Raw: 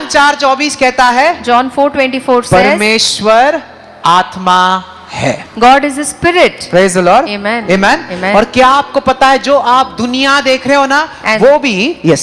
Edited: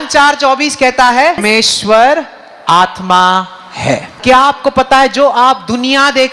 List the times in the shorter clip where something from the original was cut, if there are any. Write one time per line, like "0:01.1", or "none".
0:01.4
0:04.2